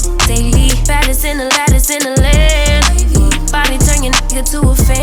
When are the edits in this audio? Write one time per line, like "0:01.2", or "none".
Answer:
none